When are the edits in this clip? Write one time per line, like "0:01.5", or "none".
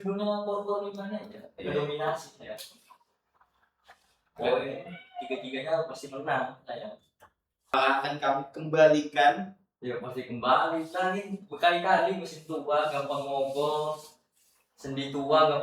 0:07.7